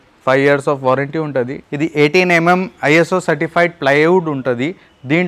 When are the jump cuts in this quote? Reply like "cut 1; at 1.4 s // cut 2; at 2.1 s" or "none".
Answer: cut 1; at 1.6 s

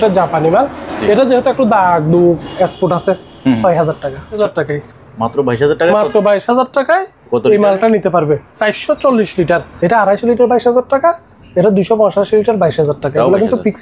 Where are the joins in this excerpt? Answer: cut 1; at 4.4 s // cut 2; at 9.7 s

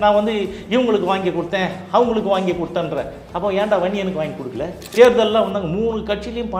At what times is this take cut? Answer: cut 1; at 4.9 s

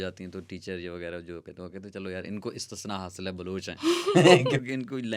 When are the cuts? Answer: none

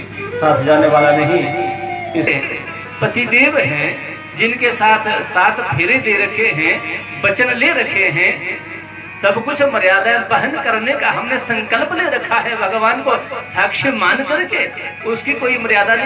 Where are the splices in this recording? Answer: cut 1; at 2.3 s

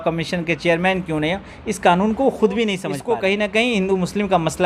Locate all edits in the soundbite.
cut 1; at 2.9 s

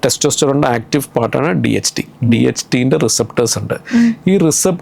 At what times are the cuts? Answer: none

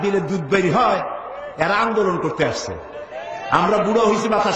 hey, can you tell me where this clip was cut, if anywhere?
none

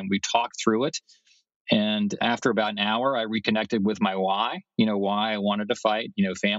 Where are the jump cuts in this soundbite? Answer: cut 1; at 2.2 s

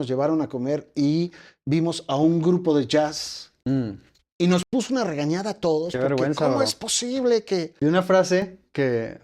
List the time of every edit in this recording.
cut 1; at 7.7 s

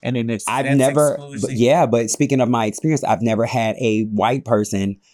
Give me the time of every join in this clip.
none

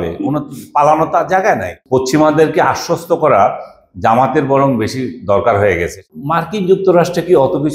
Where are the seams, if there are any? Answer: cut 1; at 1.7 s // cut 2; at 6.0 s

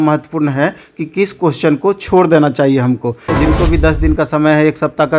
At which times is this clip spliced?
cut 1; at 3.3 s

